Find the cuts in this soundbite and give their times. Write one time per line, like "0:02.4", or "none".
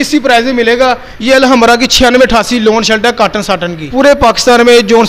0:01.1
0:03.9